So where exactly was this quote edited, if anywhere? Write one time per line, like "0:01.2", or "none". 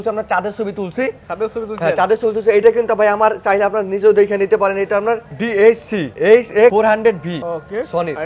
none